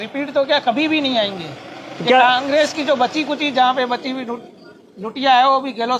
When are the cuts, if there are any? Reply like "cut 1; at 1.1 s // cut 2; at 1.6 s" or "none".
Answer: none

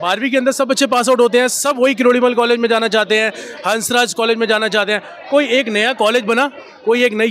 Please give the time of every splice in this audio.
none

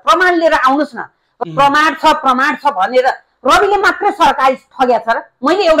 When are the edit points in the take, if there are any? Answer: cut 1; at 1.2 s

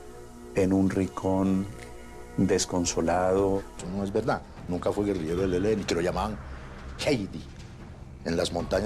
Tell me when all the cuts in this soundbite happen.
cut 1; at 3.7 s

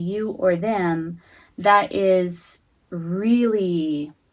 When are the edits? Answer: none

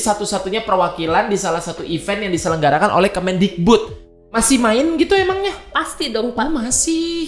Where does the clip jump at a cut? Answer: cut 1; at 4.0 s

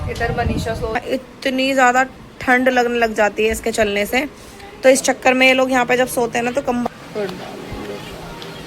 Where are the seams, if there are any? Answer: cut 1; at 1.0 s // cut 2; at 6.9 s

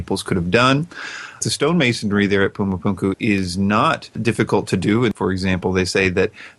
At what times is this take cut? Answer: cut 1; at 1.4 s // cut 2; at 3.2 s // cut 3; at 4.2 s // cut 4; at 5.1 s

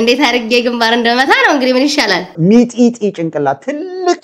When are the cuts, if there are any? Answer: cut 1; at 2.3 s

